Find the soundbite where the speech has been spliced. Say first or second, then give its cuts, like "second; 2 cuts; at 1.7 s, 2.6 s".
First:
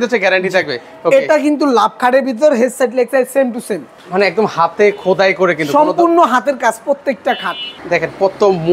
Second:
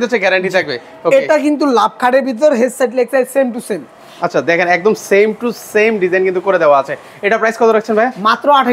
first; 2 cuts; at 3.9 s, 7.7 s